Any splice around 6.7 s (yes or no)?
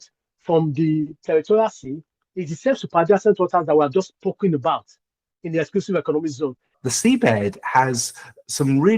yes